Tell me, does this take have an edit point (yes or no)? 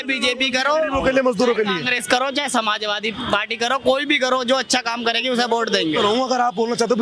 no